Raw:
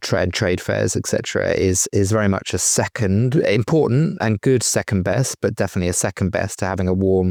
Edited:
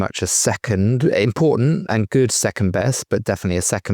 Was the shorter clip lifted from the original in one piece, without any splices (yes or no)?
yes